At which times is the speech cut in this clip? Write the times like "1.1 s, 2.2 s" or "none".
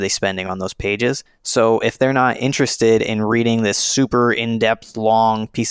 1.3 s